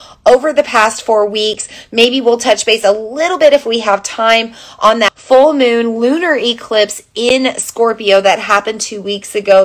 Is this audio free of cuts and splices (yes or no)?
no